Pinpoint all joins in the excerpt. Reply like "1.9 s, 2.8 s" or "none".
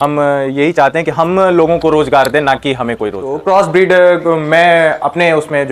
3.3 s